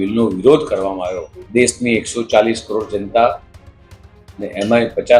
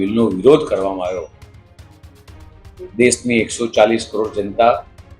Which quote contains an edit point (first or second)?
first